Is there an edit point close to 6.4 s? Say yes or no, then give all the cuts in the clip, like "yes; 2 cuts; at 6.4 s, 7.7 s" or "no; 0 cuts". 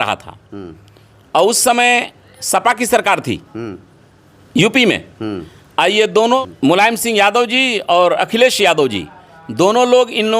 yes; 1 cut; at 6.4 s